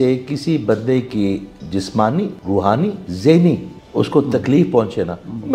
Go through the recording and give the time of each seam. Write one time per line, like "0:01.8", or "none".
0:02.7
0:03.8